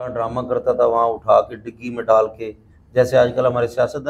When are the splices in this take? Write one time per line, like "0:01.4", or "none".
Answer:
none